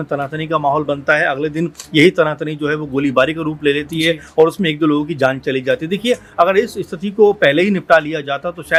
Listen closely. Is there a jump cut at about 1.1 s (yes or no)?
no